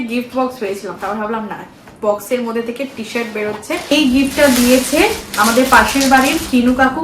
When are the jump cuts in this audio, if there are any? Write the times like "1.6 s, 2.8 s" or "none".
3.9 s

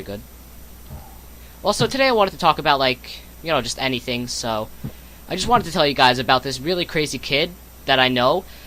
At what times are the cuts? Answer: 6.2 s

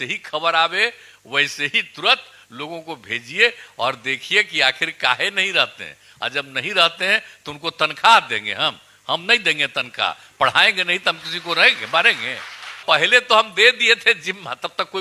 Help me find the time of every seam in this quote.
12.8 s

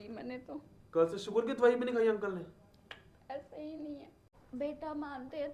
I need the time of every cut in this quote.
4.3 s

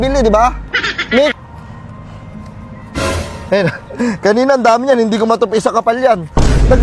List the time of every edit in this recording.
1.3 s

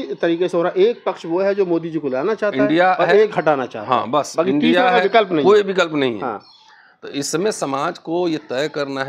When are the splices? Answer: none

